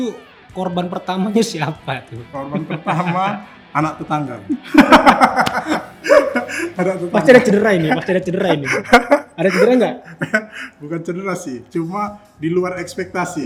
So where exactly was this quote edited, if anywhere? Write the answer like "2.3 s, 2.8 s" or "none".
none

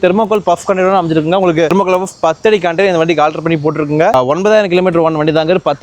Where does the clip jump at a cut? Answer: 1.7 s, 4.1 s

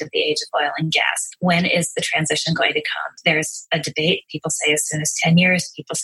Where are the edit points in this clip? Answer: 1.2 s, 3.2 s

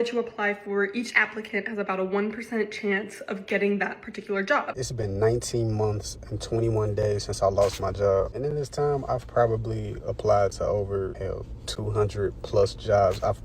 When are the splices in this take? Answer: 4.7 s, 8.3 s, 11.2 s

